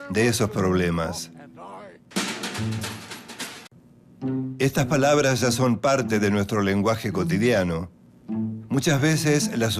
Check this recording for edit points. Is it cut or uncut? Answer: uncut